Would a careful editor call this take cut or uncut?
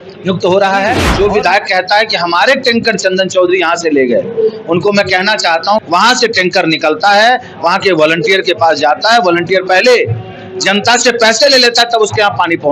cut